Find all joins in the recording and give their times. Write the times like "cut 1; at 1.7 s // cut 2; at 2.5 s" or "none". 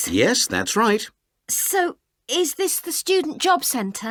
none